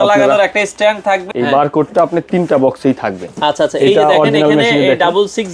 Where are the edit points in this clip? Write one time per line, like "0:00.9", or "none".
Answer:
0:01.3